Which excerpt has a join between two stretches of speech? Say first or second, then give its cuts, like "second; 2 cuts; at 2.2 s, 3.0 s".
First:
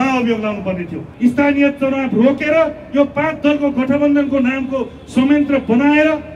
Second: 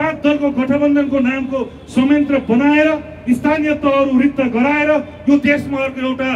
first; 1 cut; at 1.0 s